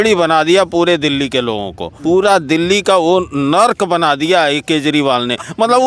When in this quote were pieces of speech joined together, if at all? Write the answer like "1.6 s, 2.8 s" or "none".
1.9 s